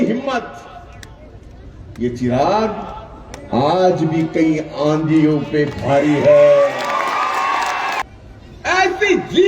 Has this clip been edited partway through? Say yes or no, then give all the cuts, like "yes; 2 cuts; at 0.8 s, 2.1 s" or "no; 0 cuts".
yes; 1 cut; at 8.0 s